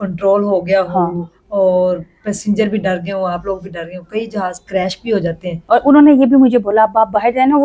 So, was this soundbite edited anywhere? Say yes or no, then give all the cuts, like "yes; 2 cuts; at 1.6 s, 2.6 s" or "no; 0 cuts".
yes; 1 cut; at 5.6 s